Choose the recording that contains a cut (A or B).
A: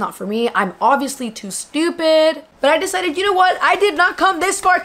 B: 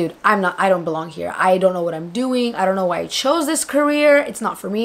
A